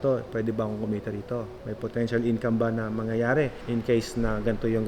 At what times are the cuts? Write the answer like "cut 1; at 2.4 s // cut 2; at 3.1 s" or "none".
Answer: cut 1; at 1.6 s // cut 2; at 3.6 s